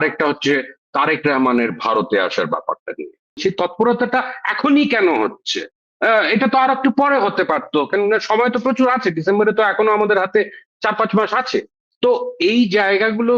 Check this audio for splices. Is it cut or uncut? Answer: cut